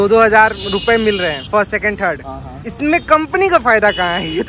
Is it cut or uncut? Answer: uncut